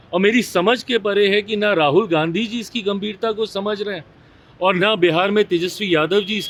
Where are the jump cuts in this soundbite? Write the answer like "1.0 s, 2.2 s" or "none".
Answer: none